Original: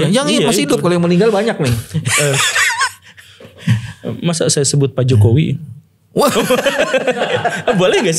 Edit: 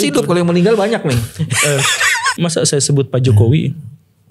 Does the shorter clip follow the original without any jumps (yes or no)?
no